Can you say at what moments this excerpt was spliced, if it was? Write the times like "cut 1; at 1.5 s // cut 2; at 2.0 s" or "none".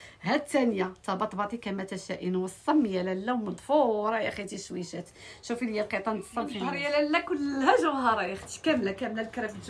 cut 1; at 6.8 s

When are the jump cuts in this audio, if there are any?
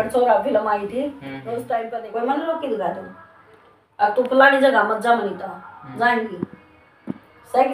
cut 1; at 1.9 s

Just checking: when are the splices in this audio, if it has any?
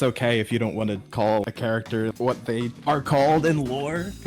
cut 1; at 1.4 s

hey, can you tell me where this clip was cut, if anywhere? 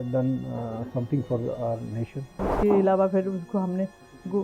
cut 1; at 2.4 s

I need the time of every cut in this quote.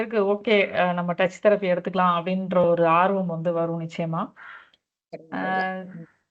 none

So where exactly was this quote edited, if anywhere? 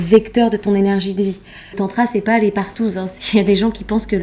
cut 1; at 1.8 s // cut 2; at 3.1 s

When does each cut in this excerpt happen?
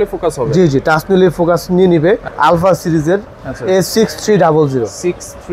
cut 1; at 2.3 s

